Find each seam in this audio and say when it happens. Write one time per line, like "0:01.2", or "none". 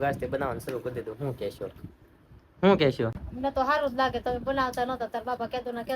0:03.2